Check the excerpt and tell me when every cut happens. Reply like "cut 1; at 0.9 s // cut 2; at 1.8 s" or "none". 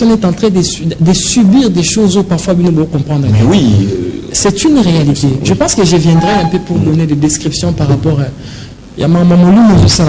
none